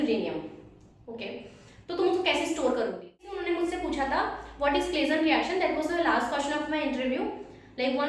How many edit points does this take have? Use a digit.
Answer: 1